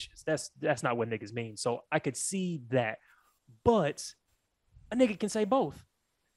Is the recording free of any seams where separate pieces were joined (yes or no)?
yes